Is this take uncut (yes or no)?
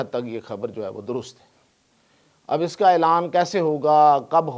yes